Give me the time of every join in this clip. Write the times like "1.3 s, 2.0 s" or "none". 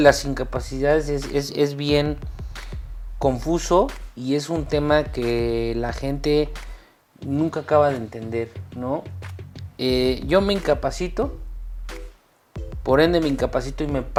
none